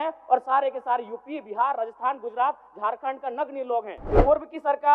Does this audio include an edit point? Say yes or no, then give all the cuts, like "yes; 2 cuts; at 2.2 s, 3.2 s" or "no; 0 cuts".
yes; 1 cut; at 4.0 s